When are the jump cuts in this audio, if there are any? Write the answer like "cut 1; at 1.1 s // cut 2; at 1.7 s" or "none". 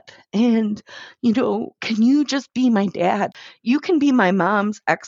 cut 1; at 3.4 s